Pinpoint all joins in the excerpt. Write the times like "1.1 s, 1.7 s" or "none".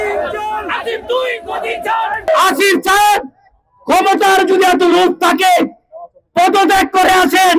2.3 s